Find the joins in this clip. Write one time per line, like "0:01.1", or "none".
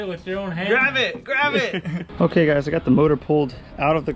0:01.9